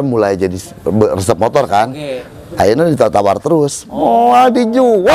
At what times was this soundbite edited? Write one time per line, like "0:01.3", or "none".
none